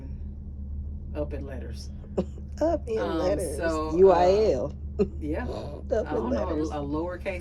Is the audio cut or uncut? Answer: uncut